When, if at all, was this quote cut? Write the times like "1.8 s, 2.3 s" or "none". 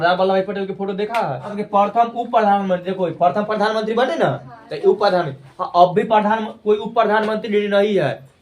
1.6 s